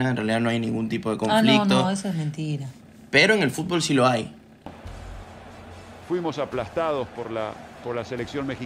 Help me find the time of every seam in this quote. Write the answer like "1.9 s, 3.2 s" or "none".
4.8 s